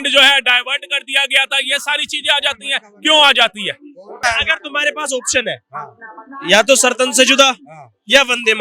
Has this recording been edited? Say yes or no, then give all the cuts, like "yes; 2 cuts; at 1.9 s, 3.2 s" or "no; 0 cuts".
yes; 1 cut; at 4.2 s